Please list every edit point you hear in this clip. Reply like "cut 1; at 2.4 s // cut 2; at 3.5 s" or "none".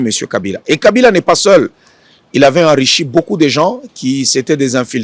none